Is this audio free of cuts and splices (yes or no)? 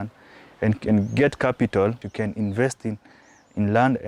no